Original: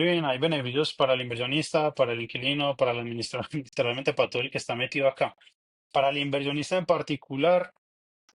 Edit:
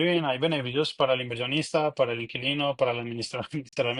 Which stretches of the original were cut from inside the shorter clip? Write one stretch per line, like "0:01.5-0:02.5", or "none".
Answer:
none

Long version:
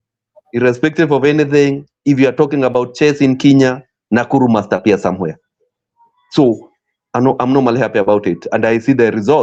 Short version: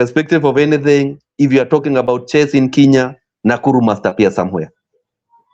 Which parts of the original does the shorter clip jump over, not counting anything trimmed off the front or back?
none

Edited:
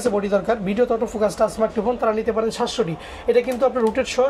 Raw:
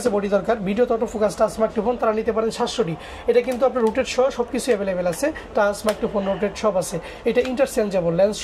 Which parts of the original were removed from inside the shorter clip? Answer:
none

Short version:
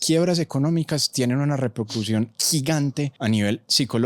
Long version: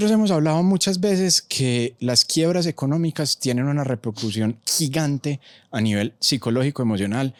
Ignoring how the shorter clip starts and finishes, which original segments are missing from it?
0:05.4-0:05.7

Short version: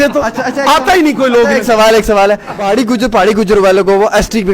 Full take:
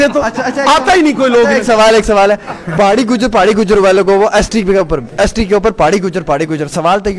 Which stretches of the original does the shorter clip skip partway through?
0:02.5-0:02.7

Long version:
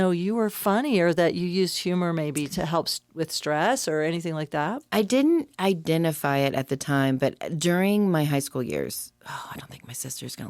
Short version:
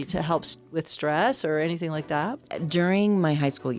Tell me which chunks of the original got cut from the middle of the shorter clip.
0:04.9-0:07.4

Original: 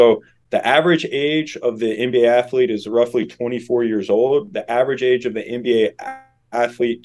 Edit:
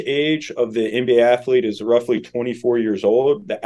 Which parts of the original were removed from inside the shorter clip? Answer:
none

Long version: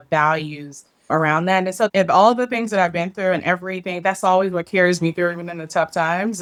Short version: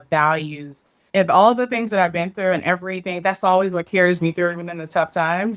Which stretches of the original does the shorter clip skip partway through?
0:01.1-0:01.9

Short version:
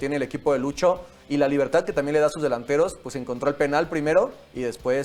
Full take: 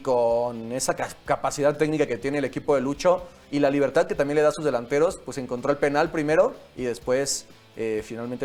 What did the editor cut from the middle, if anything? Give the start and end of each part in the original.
none

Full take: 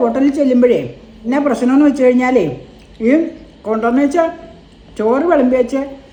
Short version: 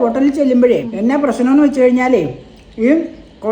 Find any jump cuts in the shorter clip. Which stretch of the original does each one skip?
0:00.9-0:01.1

